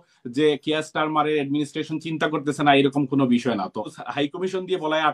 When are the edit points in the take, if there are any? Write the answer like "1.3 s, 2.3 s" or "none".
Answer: 3.9 s

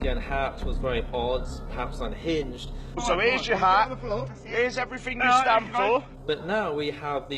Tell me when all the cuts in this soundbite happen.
2.9 s, 6.1 s

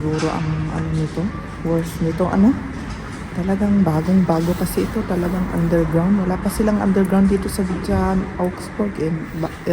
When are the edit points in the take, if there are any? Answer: none

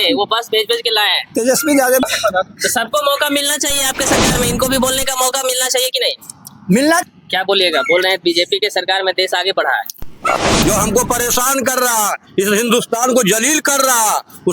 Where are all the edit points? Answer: 2.0 s, 7.0 s, 10.4 s

